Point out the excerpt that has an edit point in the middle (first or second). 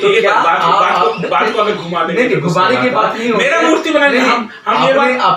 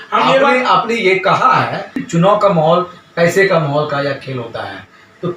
second